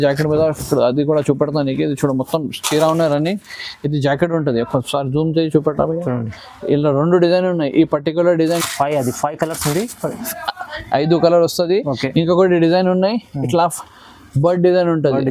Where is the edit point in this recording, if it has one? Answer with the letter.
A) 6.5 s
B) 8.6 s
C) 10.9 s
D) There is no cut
D